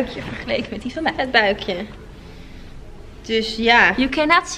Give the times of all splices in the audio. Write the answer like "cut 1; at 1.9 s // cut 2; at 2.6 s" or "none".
none